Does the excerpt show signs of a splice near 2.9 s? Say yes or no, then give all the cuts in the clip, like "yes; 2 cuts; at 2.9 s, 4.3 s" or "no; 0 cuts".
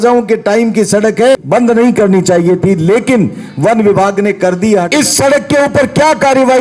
no; 2 cuts; at 1.4 s, 4.9 s